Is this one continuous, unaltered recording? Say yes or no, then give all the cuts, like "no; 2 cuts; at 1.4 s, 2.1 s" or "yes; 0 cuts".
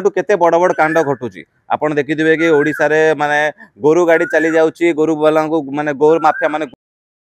yes; 0 cuts